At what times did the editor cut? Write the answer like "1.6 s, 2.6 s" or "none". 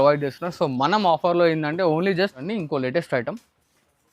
2.5 s